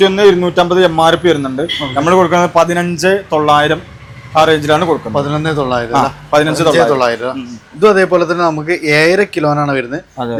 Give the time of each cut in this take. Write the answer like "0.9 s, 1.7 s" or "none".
none